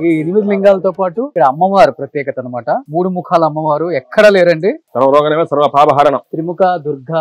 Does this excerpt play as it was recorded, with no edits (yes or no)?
no